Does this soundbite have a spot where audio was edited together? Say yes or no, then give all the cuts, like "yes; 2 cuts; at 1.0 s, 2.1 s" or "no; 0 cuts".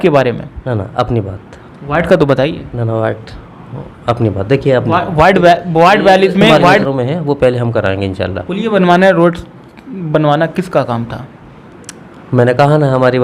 yes; 1 cut; at 6.8 s